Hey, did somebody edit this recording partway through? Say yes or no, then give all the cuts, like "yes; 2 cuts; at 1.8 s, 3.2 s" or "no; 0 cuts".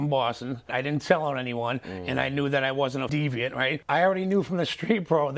no; 0 cuts